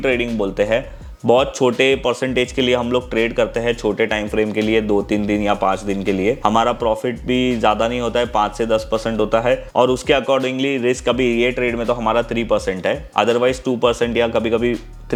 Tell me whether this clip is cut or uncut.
uncut